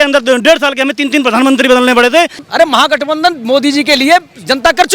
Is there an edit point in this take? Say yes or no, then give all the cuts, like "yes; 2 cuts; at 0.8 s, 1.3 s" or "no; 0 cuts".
yes; 1 cut; at 2.5 s